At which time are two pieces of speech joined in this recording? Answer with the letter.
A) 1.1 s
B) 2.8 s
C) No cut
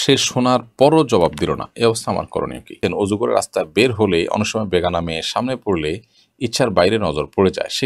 B